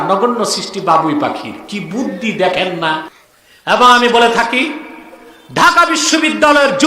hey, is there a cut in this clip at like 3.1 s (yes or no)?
yes